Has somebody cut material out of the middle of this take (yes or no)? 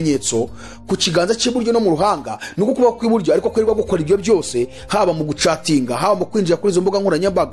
no